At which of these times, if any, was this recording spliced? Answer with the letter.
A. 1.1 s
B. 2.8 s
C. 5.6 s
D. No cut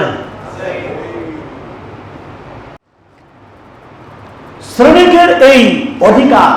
B